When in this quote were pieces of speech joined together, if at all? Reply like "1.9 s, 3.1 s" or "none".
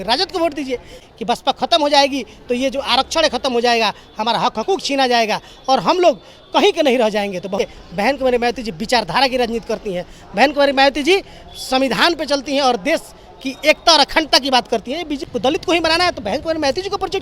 1.0 s, 7.6 s, 15.3 s